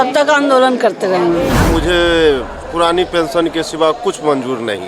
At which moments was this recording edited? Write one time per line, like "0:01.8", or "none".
0:01.7